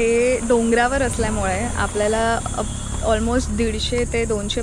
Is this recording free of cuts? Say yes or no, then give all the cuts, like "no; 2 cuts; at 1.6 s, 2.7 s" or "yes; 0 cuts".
yes; 0 cuts